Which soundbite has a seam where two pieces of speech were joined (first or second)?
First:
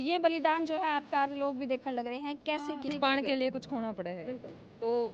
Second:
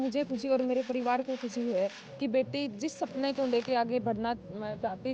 first